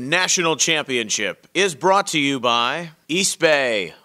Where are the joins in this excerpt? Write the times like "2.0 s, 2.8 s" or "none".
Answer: 2.9 s